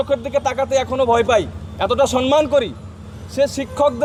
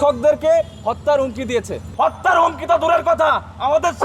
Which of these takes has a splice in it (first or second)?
second